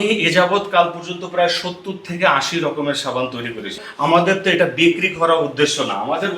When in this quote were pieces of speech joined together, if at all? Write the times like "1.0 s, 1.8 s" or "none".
3.8 s